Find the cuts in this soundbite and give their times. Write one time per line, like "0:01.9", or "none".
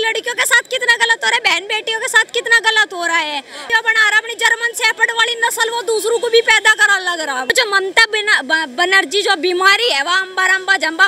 0:03.7
0:07.5